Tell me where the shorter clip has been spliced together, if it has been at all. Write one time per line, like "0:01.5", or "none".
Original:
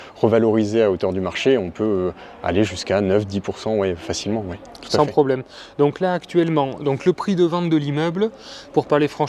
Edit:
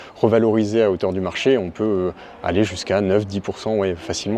none

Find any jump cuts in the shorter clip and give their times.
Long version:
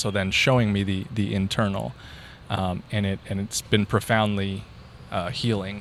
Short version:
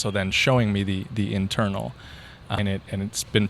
0:02.6

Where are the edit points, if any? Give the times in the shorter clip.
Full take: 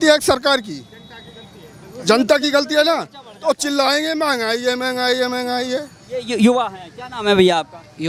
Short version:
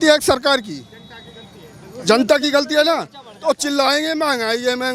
none

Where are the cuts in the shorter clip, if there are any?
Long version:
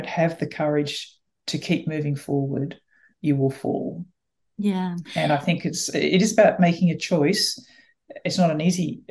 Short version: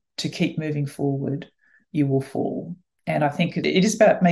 0:03.3

